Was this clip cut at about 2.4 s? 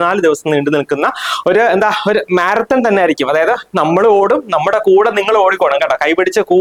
no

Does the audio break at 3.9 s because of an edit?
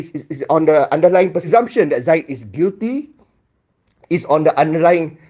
no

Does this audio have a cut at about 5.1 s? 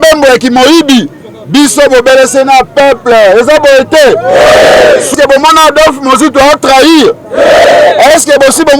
yes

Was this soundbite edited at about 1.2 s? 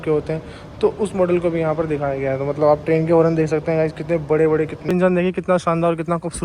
no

